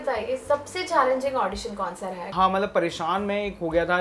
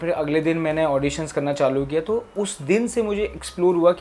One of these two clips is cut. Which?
first; 1 cut; at 2.3 s

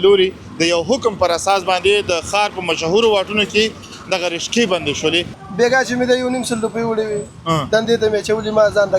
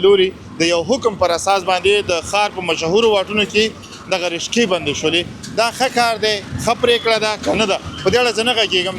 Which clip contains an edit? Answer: first; 1 cut; at 5.4 s

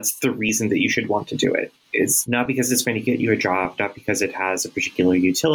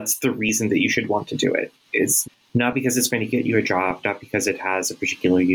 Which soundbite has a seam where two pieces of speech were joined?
first; 1 cut; at 2.5 s

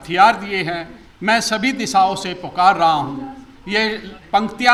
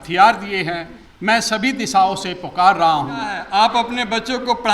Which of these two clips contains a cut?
second; 1 cut; at 3.4 s

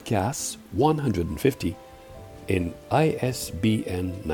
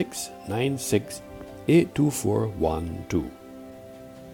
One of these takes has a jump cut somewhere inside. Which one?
second; 1 cut; at 3.3 s

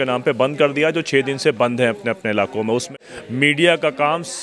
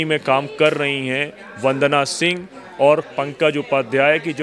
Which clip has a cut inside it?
first; 1 cut; at 2.9 s

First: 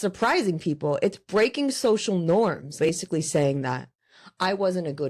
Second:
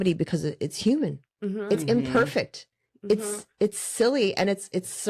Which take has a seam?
first; 1 cut; at 2.8 s

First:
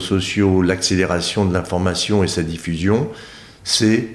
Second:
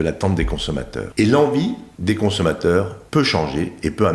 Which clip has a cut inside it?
second; 3 cuts; at 1.0 s, 1.9 s, 3.0 s

